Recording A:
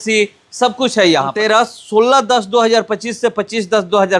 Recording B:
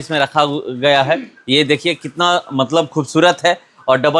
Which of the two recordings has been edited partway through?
A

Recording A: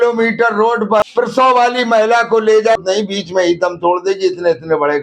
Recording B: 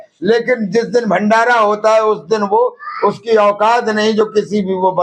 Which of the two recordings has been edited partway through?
A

